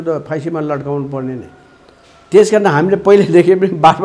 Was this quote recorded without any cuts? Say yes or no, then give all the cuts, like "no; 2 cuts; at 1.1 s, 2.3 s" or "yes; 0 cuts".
yes; 0 cuts